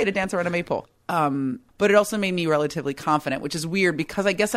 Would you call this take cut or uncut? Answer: cut